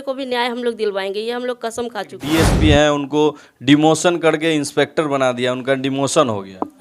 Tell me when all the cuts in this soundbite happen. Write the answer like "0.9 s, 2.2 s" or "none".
2.2 s